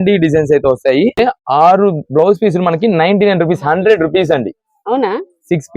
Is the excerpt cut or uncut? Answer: cut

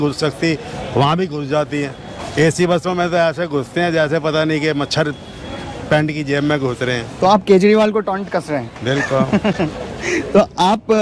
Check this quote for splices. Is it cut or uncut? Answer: uncut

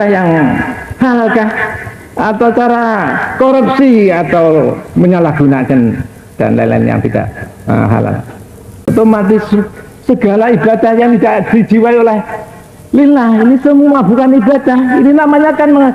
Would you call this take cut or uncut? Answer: cut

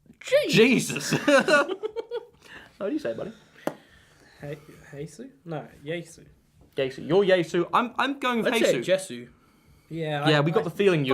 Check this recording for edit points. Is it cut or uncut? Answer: cut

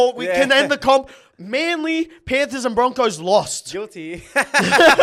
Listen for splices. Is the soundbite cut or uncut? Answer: uncut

